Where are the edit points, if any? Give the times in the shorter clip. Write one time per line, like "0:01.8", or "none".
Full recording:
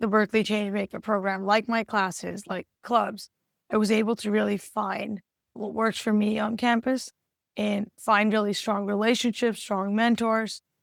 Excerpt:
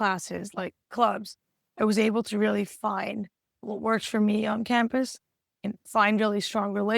0:05.7

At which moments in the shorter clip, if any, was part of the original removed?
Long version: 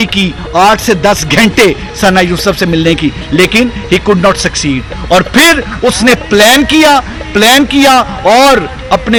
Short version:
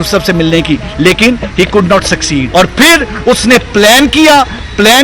0:02.5

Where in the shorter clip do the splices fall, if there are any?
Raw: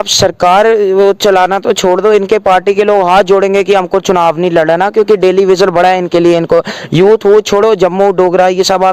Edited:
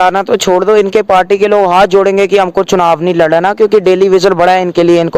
none

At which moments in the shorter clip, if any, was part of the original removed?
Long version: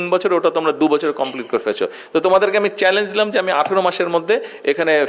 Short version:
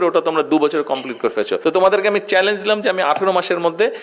0:01.6

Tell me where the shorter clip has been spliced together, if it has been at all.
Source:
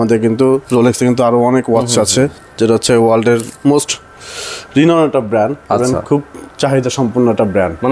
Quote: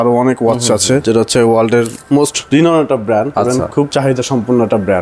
0:01.0
0:02.4
0:03.5

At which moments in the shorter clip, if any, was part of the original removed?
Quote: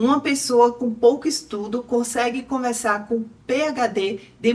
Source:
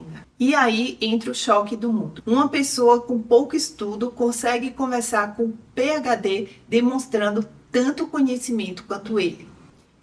none

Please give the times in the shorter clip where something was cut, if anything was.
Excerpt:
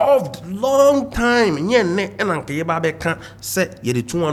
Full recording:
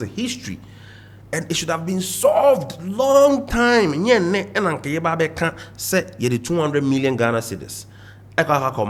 none

